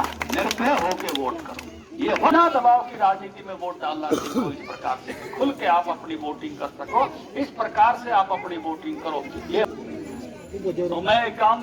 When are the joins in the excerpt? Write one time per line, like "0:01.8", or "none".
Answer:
0:02.3
0:09.6